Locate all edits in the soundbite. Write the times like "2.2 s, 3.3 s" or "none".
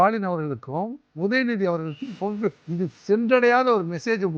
1.0 s, 2.6 s